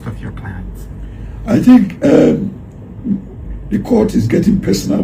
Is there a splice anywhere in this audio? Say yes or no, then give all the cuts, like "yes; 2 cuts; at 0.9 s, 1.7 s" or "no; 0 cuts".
no; 0 cuts